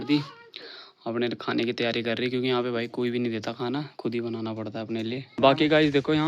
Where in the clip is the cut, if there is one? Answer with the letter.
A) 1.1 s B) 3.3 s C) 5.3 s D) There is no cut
C